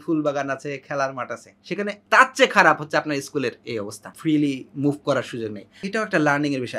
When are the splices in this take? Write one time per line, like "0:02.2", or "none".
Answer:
0:01.7
0:04.1
0:05.8

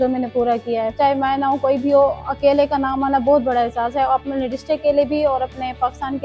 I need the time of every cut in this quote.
0:00.9

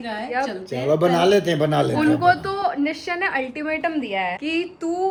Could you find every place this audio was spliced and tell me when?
none

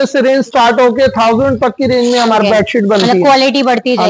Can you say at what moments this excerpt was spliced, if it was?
none

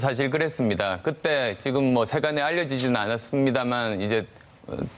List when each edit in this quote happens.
0:01.6

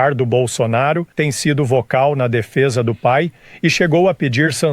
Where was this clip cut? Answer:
0:01.1

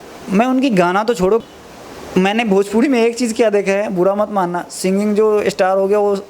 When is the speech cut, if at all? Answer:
0:01.4

